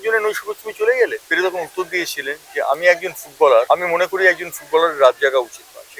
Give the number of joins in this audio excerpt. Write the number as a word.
two